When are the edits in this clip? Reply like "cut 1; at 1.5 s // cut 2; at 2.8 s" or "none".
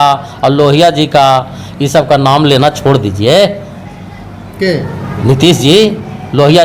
none